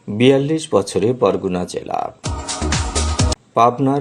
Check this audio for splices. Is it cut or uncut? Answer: uncut